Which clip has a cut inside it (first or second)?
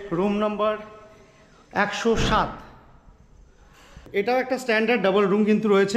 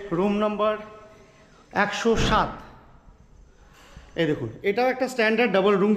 first